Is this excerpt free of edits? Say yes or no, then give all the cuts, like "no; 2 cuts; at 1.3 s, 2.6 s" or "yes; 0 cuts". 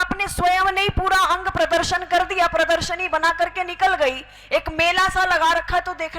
yes; 0 cuts